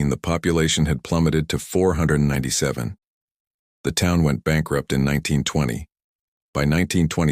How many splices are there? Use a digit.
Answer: 1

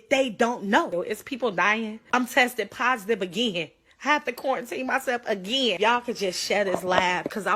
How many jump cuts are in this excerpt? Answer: 3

